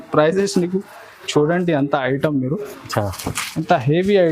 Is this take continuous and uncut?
yes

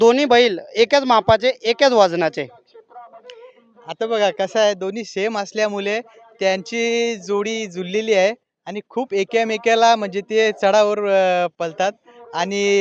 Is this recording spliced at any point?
no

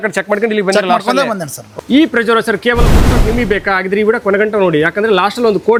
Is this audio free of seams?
yes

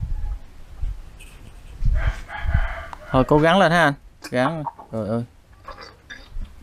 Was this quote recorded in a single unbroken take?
yes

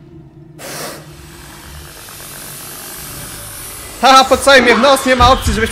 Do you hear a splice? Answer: no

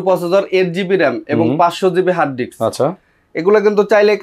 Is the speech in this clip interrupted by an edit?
no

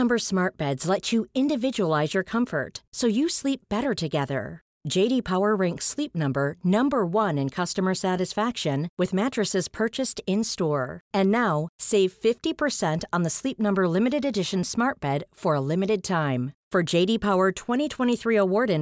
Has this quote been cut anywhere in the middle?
no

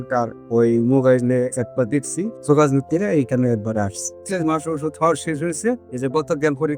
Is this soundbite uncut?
no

